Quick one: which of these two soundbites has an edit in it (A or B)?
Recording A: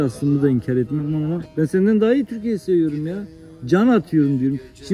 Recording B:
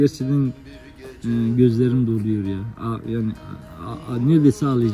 A